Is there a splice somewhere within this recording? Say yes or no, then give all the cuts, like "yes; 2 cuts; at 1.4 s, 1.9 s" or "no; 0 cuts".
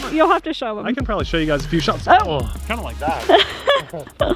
no; 0 cuts